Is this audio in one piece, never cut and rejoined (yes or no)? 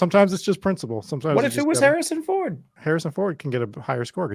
no